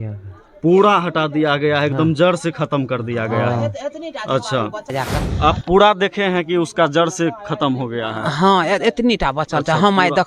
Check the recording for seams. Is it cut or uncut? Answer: cut